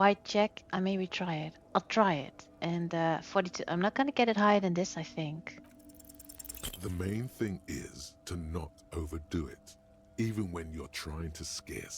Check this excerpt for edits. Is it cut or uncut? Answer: uncut